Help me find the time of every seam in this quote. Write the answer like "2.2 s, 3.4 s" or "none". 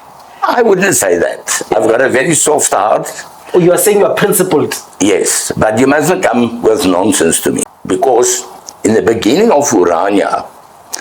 7.7 s